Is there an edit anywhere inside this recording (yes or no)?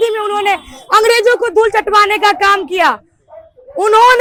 no